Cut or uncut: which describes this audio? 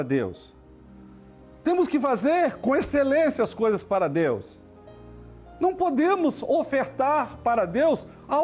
uncut